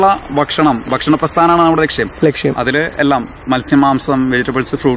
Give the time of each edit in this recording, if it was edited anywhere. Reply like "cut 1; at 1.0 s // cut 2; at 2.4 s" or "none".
none